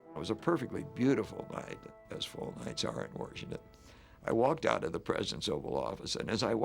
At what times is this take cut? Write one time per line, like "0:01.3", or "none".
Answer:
0:01.9